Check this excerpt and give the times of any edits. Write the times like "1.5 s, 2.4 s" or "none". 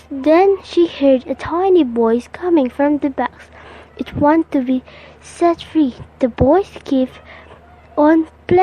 1.4 s, 6.0 s